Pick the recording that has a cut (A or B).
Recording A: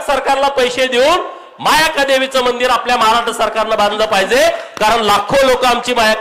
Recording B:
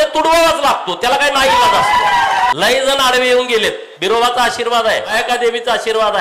B